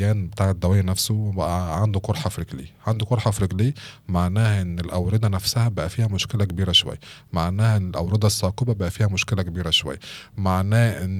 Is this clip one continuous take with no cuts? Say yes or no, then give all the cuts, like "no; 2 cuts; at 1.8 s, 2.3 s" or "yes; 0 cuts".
yes; 0 cuts